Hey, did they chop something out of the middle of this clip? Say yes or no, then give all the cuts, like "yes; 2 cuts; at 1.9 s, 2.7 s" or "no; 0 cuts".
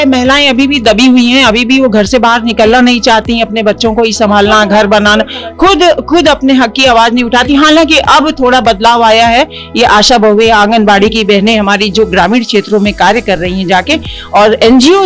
no; 0 cuts